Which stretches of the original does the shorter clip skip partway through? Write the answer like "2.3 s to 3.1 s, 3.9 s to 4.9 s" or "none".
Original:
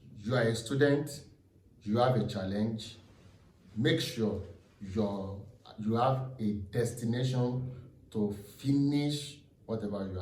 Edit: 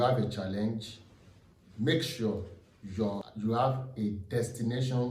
5.2 s to 5.7 s